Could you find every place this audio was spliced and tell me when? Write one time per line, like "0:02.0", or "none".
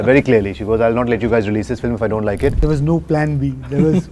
0:02.6